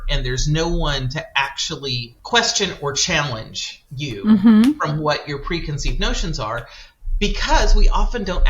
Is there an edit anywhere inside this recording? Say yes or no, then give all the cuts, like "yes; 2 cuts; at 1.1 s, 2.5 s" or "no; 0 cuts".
yes; 1 cut; at 2.1 s